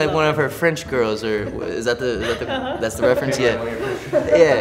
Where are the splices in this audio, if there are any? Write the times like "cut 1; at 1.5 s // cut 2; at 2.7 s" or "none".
none